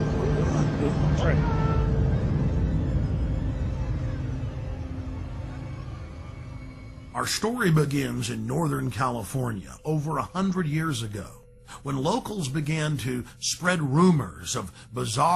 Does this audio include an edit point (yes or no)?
no